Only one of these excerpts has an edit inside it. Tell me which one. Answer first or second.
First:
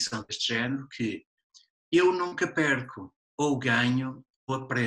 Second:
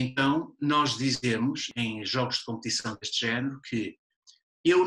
second